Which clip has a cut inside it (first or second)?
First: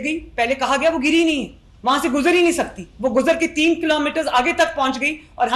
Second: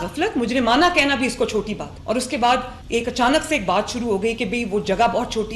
second